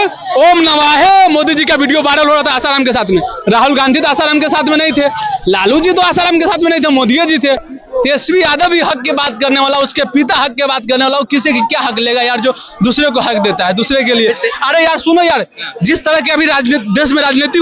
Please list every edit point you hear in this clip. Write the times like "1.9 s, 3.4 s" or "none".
7.7 s

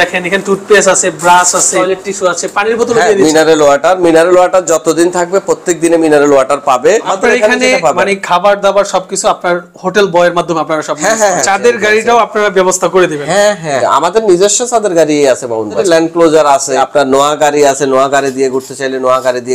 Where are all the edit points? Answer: 1.7 s, 7.1 s, 11.4 s, 13.8 s, 15.8 s, 16.8 s

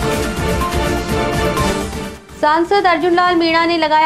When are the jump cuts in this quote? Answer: 2.1 s

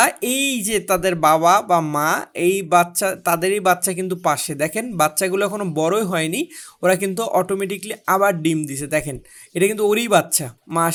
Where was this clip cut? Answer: none

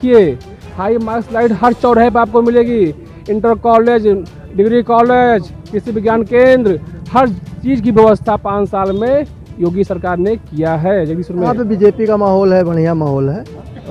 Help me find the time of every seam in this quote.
11.5 s

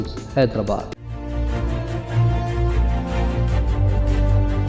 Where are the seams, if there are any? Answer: 0.9 s

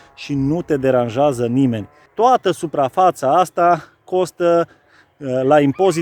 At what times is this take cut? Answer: 2.0 s

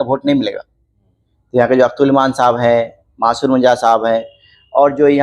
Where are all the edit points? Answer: none

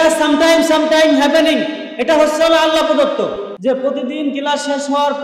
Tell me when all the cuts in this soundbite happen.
3.5 s

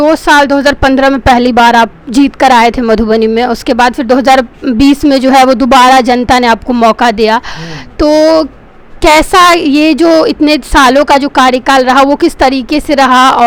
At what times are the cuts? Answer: none

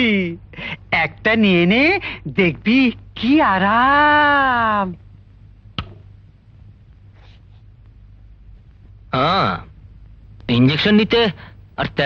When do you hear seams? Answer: none

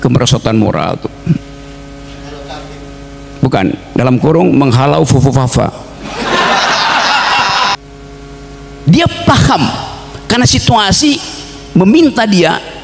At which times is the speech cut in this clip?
7.8 s

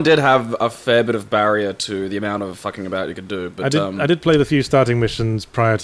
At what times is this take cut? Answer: none

